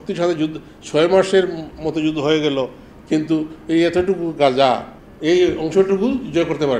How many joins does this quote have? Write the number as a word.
one